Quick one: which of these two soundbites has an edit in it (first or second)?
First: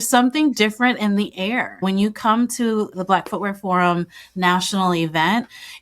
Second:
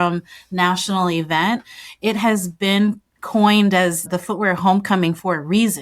first